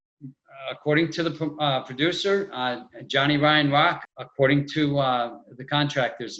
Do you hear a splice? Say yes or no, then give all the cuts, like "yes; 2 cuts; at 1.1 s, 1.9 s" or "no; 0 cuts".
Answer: yes; 1 cut; at 4.1 s